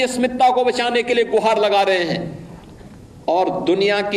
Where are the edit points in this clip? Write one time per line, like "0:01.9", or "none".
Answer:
none